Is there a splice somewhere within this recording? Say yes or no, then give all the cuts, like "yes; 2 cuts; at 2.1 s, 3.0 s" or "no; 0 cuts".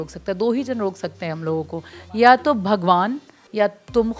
no; 0 cuts